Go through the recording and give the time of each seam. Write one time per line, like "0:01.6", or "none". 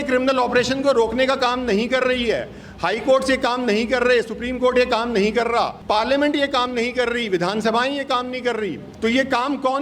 0:05.8
0:08.9